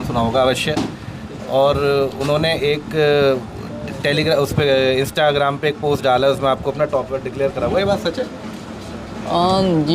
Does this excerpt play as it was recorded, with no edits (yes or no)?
yes